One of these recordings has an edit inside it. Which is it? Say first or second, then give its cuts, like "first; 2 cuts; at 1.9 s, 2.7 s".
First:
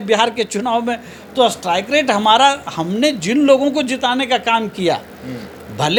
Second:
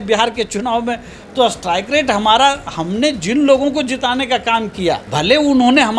second; 1 cut; at 5.0 s